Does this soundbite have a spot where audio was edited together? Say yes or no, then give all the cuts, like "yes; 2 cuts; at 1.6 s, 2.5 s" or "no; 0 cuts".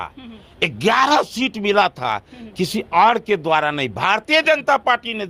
no; 0 cuts